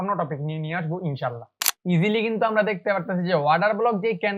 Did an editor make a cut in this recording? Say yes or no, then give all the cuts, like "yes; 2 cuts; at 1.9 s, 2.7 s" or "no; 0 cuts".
yes; 1 cut; at 1.7 s